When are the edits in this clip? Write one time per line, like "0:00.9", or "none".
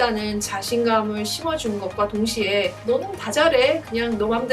0:02.8

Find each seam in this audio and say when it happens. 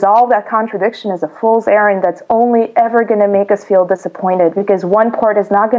none

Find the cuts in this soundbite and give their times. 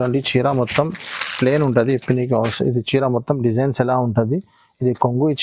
none

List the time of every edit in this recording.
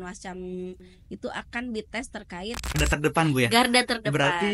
0:02.8

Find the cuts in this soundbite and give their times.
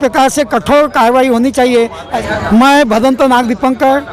0:02.1

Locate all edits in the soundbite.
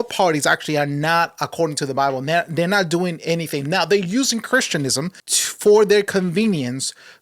0:05.2

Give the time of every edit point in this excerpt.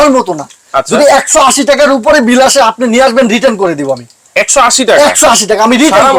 none

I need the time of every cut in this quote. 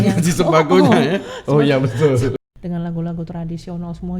0:02.4

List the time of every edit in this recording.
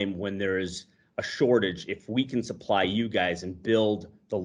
none

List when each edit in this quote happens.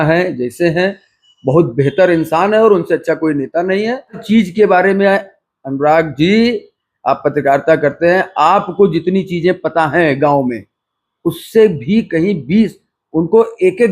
0:04.2

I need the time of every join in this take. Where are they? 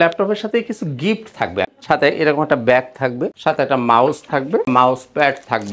0:01.7

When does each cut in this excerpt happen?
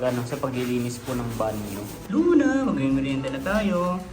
0:02.0

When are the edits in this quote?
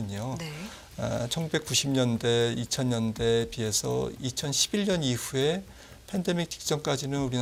none

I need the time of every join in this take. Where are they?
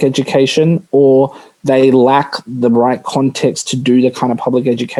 none

